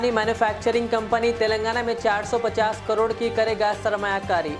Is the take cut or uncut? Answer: uncut